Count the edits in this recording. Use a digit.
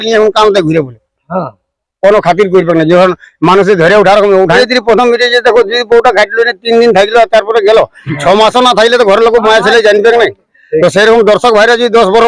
1